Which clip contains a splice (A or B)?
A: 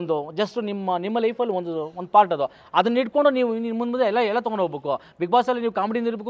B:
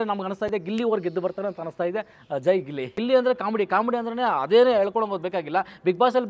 B